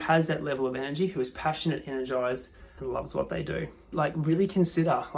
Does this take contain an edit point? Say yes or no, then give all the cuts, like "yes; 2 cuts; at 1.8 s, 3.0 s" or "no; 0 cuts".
yes; 1 cut; at 3.9 s